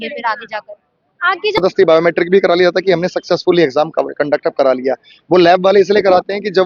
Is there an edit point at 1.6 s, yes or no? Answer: yes